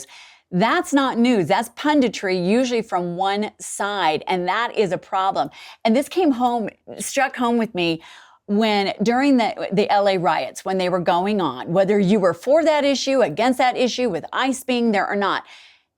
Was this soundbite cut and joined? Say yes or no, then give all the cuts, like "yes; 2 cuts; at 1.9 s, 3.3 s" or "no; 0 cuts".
no; 0 cuts